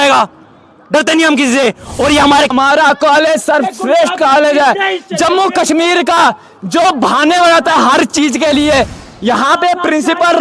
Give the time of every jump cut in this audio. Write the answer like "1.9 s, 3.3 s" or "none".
2.5 s

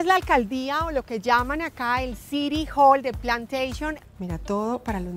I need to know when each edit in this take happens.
4.0 s

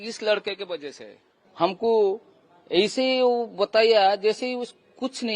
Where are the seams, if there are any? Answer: 1.8 s

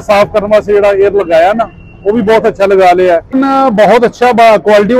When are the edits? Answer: 3.3 s

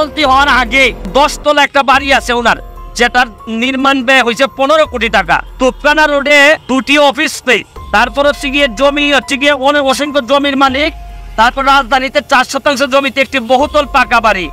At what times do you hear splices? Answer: 1.1 s, 5.5 s, 6.6 s, 7.7 s

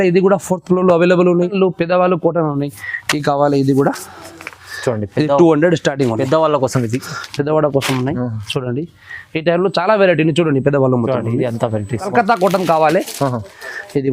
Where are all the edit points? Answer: 1.5 s, 12.1 s

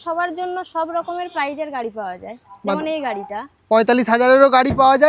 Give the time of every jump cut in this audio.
none

